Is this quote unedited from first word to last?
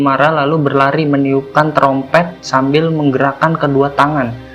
no; 1 cut; at 2.4 s

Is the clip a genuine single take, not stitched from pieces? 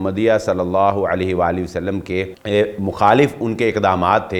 no; 1 cut; at 2.4 s

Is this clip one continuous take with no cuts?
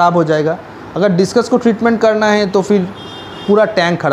yes; 0 cuts

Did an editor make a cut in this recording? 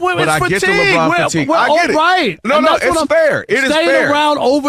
no; 0 cuts

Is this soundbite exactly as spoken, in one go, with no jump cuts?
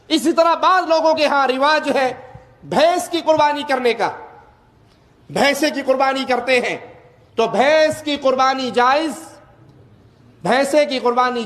yes; 0 cuts

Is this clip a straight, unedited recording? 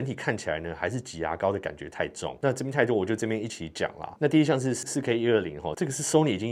yes; 0 cuts

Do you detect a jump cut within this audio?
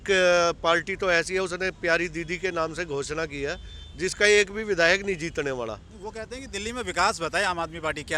no; 0 cuts

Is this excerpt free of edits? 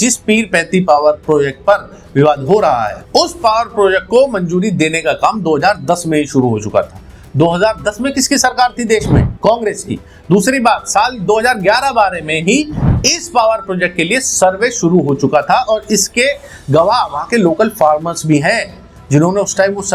yes; 0 cuts

